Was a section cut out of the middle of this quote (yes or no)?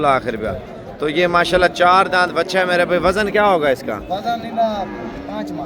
no